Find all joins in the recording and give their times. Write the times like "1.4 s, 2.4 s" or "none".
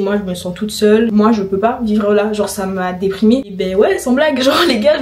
1.1 s, 3.5 s